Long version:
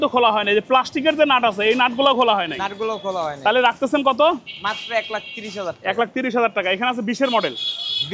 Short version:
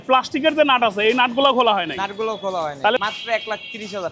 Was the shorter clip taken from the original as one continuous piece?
no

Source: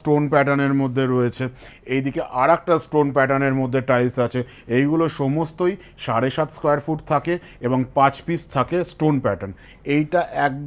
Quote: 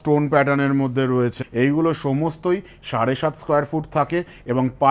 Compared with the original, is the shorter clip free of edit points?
no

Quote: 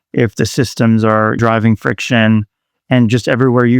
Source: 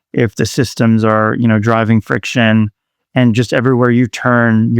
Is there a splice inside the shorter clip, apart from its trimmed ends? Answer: yes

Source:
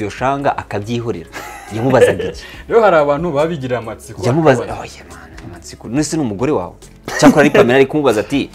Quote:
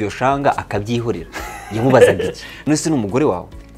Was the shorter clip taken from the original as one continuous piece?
no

